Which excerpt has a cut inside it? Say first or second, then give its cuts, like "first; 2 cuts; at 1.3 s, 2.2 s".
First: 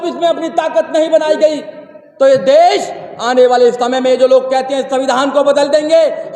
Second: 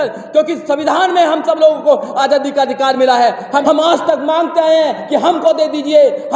second; 1 cut; at 3.6 s